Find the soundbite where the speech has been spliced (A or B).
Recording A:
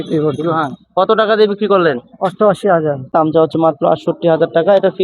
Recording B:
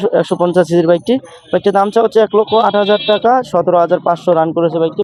A